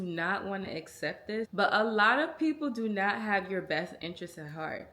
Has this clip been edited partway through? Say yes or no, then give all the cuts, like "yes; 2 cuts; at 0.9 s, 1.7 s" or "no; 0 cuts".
yes; 1 cut; at 1.5 s